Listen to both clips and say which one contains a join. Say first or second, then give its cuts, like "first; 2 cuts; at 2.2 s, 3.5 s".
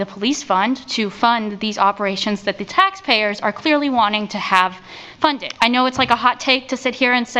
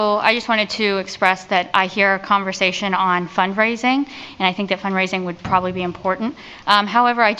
first; 1 cut; at 5.5 s